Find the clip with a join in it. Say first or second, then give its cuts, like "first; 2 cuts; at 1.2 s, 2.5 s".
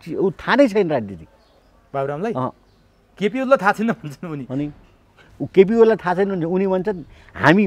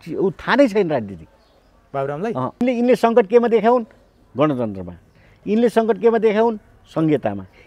second; 1 cut; at 2.6 s